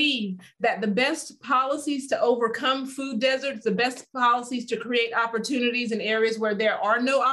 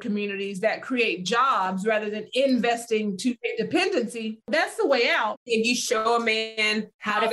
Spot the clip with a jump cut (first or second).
second